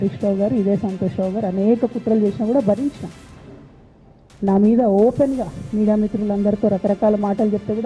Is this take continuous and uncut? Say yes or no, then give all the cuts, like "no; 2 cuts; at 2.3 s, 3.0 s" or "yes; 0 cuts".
yes; 0 cuts